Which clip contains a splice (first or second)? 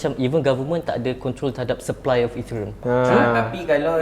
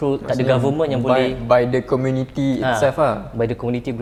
first